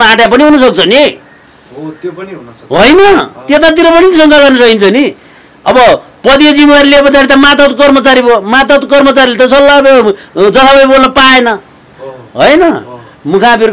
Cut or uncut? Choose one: uncut